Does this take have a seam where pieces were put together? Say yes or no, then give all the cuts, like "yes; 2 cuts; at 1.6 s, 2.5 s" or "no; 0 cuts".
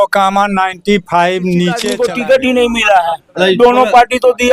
yes; 1 cut; at 1.9 s